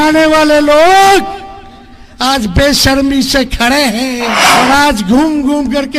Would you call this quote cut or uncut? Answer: cut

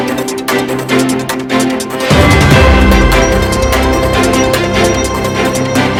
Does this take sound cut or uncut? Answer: uncut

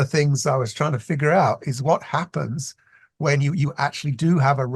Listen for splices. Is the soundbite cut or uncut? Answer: uncut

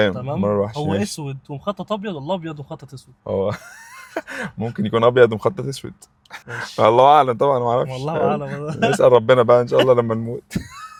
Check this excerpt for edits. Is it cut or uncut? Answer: uncut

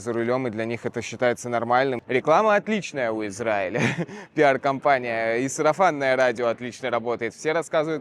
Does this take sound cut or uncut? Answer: cut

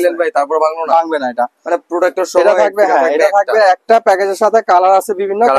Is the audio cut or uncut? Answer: uncut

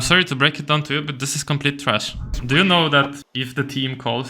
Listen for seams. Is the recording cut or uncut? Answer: cut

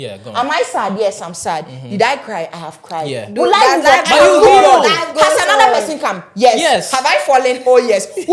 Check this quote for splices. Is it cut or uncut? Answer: uncut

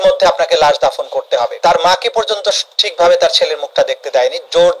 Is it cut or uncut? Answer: cut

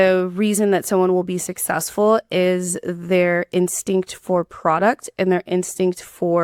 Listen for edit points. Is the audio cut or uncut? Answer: uncut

